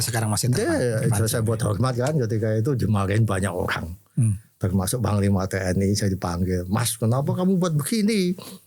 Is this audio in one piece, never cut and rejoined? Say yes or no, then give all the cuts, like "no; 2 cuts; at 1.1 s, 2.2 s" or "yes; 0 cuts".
yes; 0 cuts